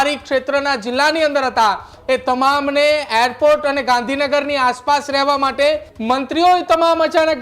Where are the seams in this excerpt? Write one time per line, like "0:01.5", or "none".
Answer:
0:05.9